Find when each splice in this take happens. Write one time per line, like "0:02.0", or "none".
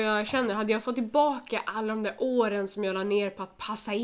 none